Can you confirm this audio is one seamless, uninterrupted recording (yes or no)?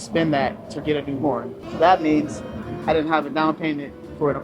no